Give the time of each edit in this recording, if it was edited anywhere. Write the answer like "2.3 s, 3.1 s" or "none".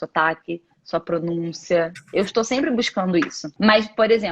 3.4 s